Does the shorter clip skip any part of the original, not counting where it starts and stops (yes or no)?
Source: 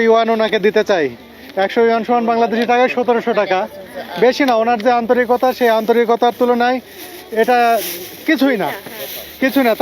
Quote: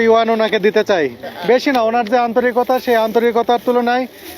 yes